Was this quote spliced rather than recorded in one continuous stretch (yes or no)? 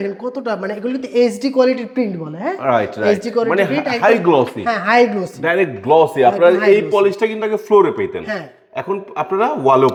no